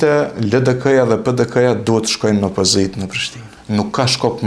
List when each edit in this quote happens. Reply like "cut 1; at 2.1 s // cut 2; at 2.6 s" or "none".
cut 1; at 3.4 s